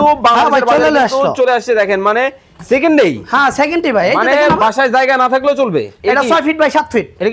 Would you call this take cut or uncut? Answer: cut